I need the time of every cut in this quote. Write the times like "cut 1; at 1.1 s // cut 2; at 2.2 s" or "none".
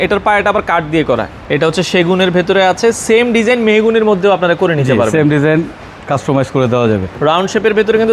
cut 1; at 1.3 s // cut 2; at 7.1 s